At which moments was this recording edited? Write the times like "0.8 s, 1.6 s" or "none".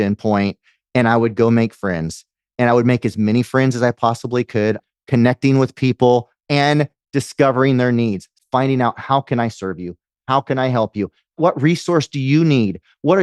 4.8 s, 6.4 s, 8.3 s, 11.4 s

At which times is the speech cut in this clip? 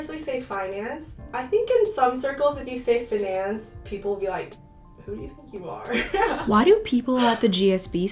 1.1 s

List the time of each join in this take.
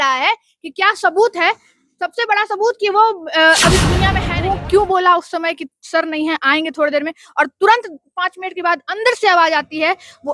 4.2 s

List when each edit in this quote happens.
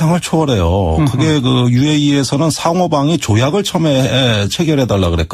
none

